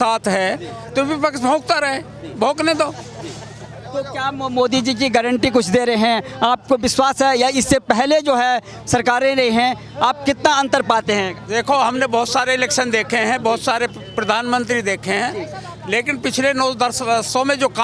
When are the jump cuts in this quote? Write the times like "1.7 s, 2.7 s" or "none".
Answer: none